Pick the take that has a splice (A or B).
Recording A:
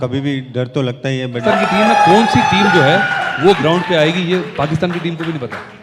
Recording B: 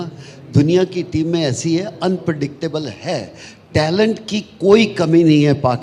A